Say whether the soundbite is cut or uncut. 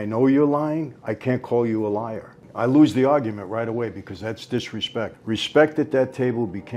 cut